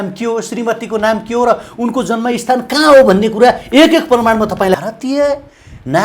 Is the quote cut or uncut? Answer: cut